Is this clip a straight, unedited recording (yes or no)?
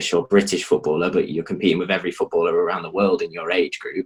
yes